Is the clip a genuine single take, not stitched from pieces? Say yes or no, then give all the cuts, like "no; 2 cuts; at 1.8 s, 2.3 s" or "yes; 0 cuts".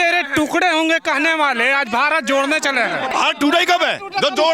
no; 1 cut; at 3.1 s